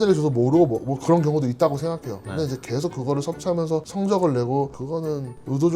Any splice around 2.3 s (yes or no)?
no